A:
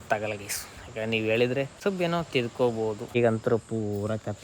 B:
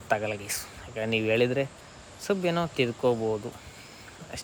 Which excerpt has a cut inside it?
A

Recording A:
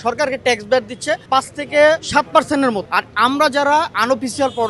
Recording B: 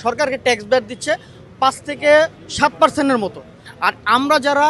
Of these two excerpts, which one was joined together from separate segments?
A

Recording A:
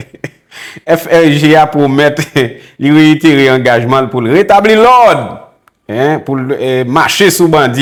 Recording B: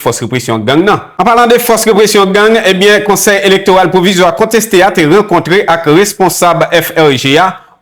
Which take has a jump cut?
B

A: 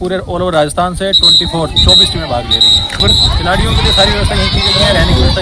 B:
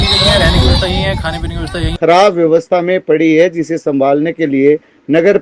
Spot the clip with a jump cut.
B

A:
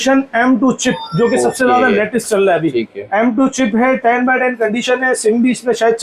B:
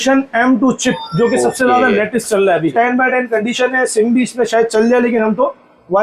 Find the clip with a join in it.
B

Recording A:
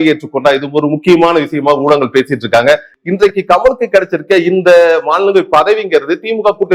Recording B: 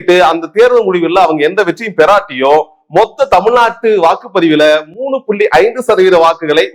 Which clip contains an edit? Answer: A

